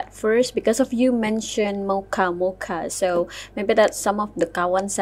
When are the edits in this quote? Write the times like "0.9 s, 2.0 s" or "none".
none